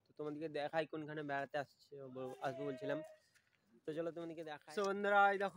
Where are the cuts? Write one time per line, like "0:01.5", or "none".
0:04.6